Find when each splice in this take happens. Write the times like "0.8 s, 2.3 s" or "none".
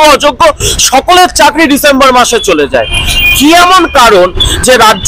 none